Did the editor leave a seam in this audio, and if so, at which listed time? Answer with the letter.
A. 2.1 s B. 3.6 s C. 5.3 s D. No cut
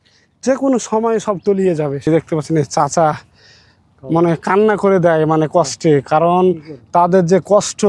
A